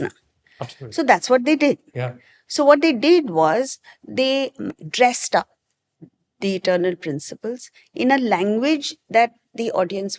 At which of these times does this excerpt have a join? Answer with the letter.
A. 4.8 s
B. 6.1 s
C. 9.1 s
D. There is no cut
A